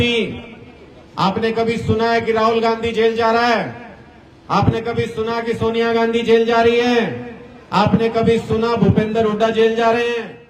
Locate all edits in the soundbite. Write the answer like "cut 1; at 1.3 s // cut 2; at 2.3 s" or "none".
none